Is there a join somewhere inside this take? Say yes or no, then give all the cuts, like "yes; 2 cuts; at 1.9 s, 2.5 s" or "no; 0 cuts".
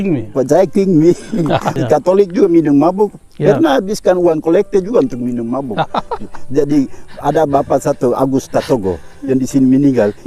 yes; 1 cut; at 1.8 s